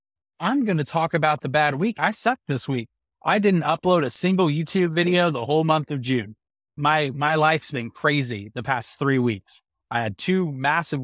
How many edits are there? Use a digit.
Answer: 1